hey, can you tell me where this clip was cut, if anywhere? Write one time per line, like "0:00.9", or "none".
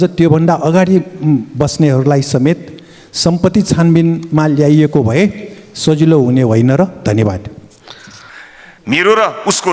0:08.0